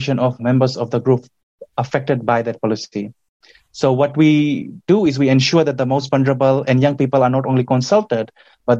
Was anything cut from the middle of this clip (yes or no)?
no